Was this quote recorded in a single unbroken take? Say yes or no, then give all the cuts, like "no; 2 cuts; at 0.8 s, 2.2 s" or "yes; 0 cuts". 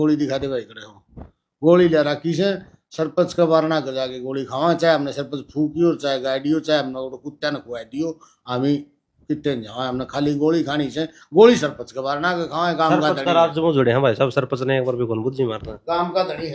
yes; 0 cuts